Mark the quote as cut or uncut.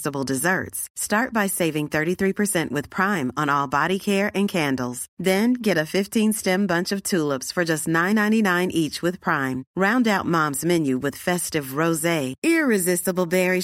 uncut